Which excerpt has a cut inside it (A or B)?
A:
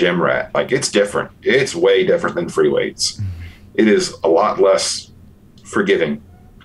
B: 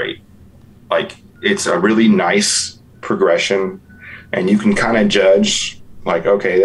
B